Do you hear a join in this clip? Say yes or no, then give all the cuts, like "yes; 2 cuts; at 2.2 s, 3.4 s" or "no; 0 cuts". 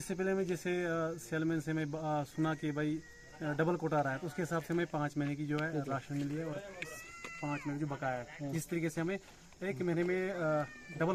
no; 0 cuts